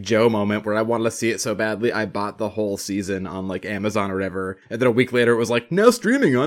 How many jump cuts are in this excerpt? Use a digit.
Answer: 1